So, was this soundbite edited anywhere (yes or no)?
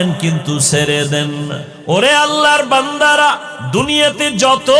yes